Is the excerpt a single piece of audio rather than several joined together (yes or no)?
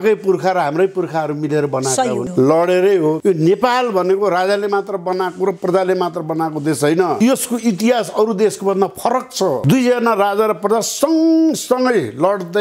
no